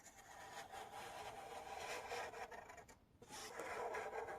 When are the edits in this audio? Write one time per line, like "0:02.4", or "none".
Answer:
0:03.4